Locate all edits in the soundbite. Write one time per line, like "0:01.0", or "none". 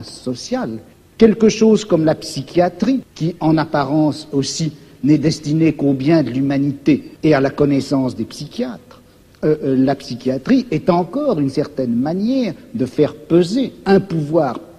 0:00.9
0:03.1
0:07.1